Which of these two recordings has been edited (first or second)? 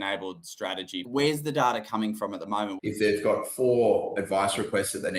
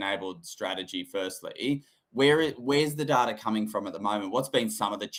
first